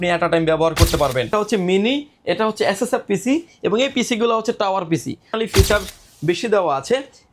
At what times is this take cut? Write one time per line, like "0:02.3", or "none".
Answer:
0:01.3
0:05.4